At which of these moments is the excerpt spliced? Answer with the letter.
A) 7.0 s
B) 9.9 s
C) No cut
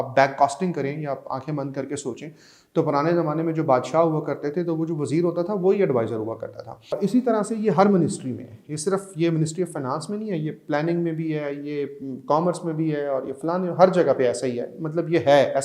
A